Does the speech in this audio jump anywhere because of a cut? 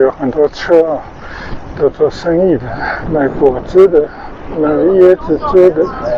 no; 0 cuts

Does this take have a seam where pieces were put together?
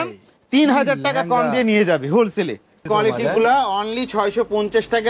yes; 1 cut; at 2.8 s

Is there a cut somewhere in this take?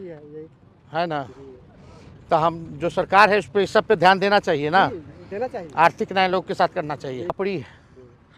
yes; 1 cut; at 7.3 s

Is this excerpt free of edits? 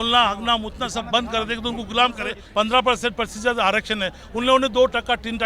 no; 1 cut; at 2.4 s

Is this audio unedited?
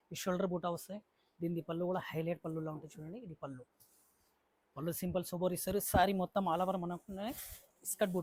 yes; 0 cuts

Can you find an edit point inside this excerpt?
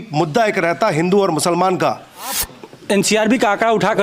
yes; 1 cut; at 2.4 s

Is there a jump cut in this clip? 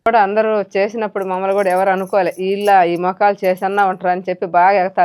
no; 0 cuts

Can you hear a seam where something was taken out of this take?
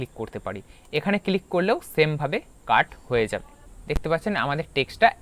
yes; 1 cut; at 3.6 s

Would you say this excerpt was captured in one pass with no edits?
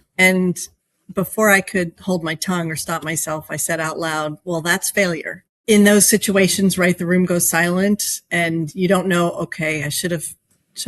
no; 1 cut; at 5.5 s

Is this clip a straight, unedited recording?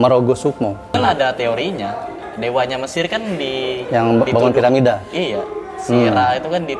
no; 1 cut; at 0.9 s

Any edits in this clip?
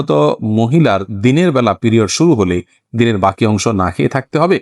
no; 0 cuts

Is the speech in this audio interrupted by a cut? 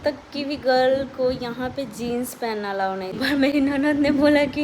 yes; 1 cut; at 3.2 s

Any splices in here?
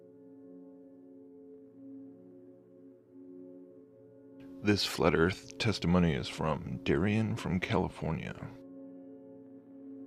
no; 0 cuts

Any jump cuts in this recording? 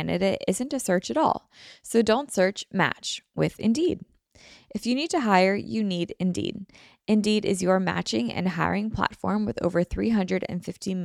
no; 0 cuts

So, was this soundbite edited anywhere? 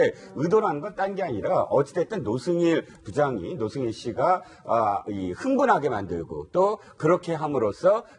yes; 1 cut; at 2.4 s

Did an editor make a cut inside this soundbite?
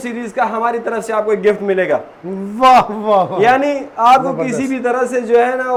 no; 0 cuts

